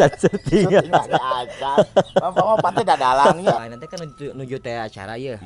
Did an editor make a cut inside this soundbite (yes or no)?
yes